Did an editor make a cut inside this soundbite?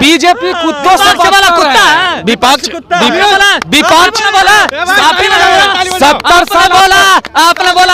no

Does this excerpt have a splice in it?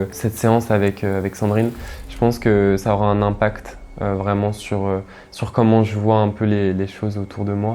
no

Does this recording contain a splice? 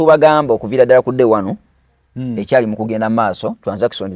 no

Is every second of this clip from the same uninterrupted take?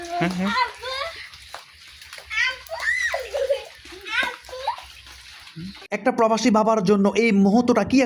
no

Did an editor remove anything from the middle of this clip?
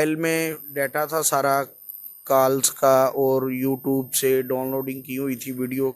no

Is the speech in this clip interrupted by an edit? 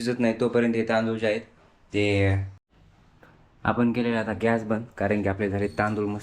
yes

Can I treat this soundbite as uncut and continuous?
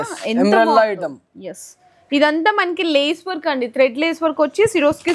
yes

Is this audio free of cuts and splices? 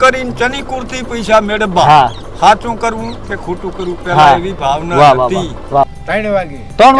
no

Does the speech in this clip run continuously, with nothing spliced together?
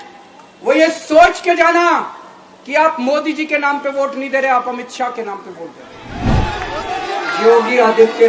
no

